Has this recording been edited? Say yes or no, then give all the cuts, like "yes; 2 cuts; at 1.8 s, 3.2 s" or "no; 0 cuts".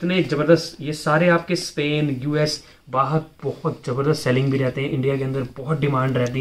no; 0 cuts